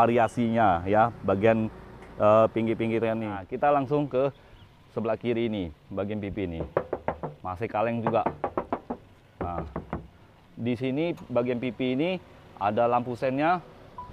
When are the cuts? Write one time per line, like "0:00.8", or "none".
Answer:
0:03.4